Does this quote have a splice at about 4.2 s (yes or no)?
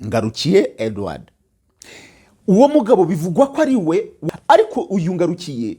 yes